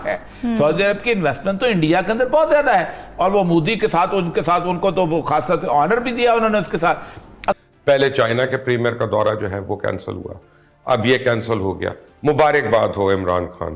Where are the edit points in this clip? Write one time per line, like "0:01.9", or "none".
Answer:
0:07.6